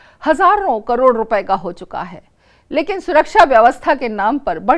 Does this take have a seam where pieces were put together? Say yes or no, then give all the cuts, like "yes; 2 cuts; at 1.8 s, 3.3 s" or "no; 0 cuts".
no; 0 cuts